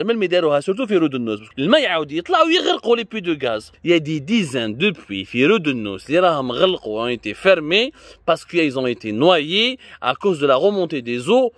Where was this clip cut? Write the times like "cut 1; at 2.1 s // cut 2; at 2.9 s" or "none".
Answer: cut 1; at 1.4 s // cut 2; at 3.7 s